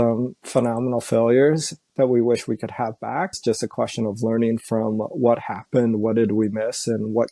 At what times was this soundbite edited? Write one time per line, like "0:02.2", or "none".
0:03.4